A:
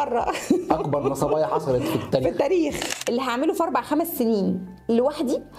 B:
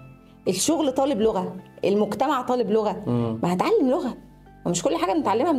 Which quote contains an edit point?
A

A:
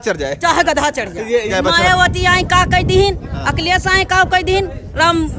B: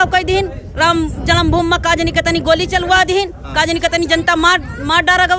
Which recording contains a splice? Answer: A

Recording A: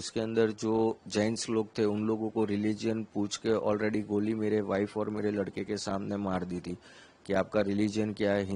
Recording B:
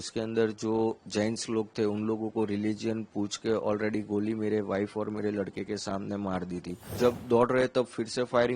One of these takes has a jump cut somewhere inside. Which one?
B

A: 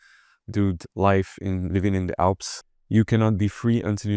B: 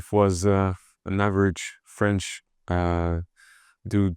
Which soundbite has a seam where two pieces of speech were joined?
A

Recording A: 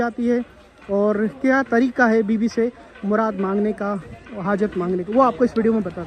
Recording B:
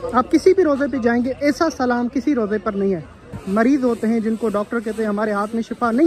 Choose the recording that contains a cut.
B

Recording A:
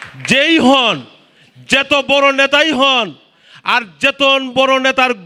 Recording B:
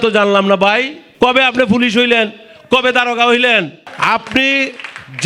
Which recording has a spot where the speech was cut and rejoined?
B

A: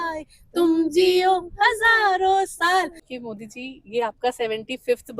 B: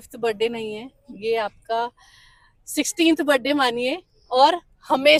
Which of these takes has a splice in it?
A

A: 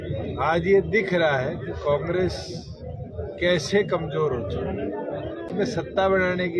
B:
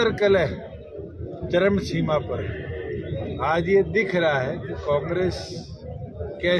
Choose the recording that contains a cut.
A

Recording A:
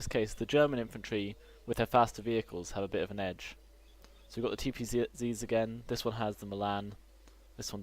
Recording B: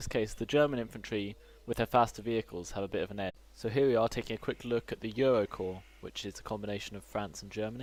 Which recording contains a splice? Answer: A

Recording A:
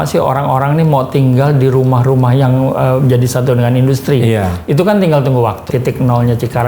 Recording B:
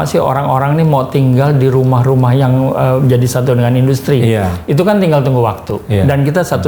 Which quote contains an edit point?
A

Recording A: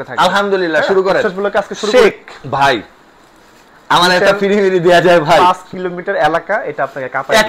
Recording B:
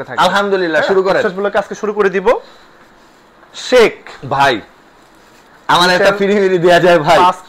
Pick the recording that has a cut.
A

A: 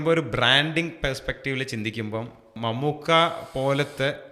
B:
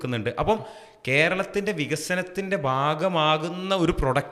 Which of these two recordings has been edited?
A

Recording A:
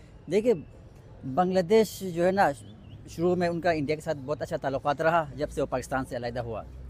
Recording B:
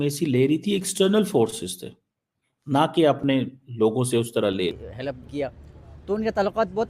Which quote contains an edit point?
B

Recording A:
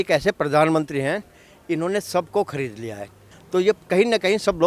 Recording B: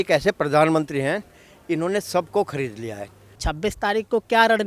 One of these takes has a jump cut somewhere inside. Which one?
B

